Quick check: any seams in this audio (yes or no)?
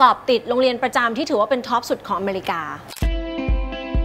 no